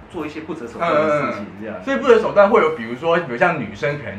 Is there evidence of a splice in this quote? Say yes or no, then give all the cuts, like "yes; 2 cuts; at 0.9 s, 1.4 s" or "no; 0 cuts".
no; 0 cuts